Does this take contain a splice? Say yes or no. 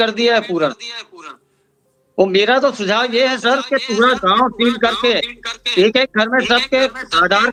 no